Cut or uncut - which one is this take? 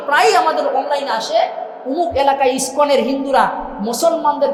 uncut